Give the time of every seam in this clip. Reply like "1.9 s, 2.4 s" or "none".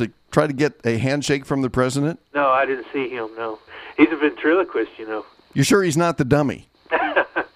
3.7 s, 5.4 s